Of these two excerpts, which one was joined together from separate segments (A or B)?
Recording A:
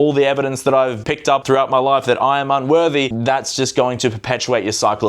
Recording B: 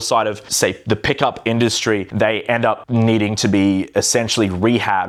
A